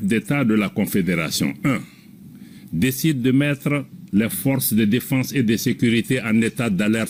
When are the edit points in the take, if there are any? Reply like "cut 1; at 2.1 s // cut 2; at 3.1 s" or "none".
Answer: none